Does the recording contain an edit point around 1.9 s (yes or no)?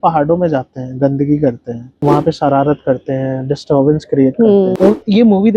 yes